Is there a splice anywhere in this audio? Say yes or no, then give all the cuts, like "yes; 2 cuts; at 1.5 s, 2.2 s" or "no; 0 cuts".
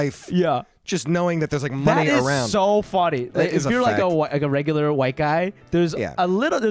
no; 0 cuts